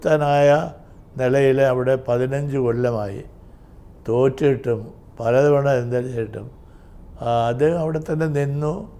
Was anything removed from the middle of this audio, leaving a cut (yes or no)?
no